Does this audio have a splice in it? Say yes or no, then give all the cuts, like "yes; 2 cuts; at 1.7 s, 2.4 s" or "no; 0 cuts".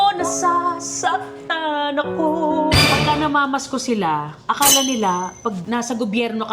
yes; 2 cuts; at 2.8 s, 5.6 s